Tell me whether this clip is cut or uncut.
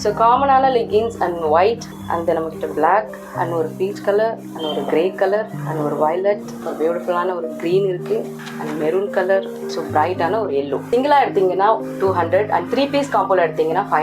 cut